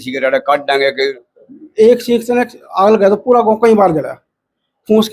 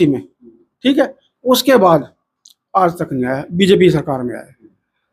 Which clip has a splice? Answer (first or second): first